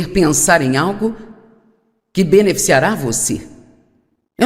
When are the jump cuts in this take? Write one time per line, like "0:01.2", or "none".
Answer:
0:02.8